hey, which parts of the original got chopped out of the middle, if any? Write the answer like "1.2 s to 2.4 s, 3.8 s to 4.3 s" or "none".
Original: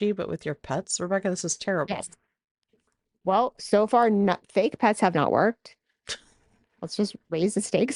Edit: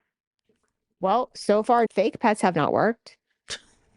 4.1 s to 4.5 s